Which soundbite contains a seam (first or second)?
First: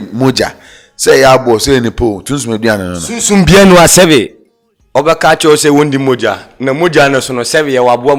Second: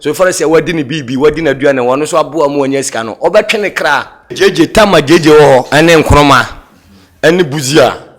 second